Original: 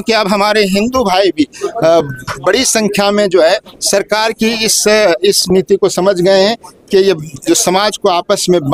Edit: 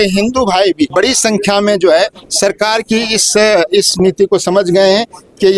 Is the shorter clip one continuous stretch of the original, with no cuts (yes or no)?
no